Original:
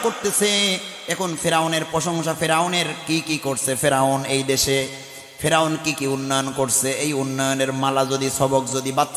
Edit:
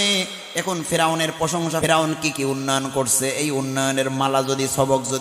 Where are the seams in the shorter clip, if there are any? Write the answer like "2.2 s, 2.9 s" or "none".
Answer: 1.8 s